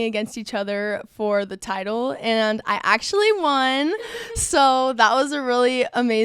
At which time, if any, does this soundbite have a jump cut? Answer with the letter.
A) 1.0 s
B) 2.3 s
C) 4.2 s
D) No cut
D